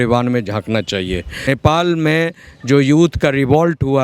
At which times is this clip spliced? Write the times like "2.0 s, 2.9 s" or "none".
1.5 s